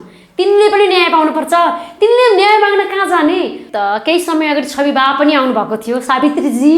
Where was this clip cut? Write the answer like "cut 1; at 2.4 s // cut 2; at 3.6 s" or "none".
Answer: cut 1; at 3.7 s